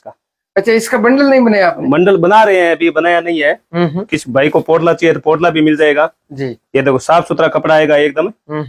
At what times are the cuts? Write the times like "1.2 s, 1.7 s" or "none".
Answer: none